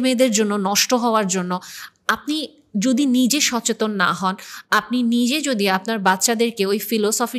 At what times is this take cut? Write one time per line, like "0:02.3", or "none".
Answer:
none